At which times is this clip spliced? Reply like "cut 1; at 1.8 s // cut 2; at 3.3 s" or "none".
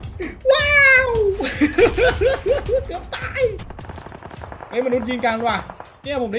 cut 1; at 3.7 s